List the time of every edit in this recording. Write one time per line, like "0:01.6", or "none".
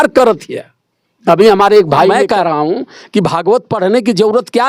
0:02.1

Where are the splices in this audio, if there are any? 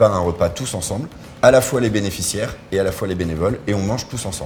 none

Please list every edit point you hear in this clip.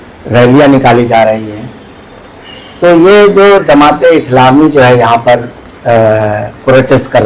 none

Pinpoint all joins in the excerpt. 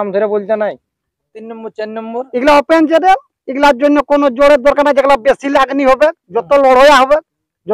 0:01.3

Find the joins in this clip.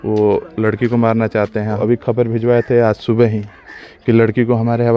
0:01.8

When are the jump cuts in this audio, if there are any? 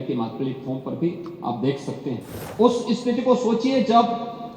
0:02.4

